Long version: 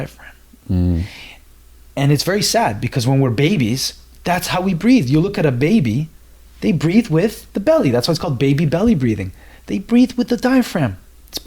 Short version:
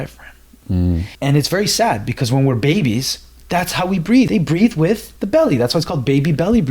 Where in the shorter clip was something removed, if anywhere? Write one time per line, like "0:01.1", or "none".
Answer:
0:01.1
0:04.3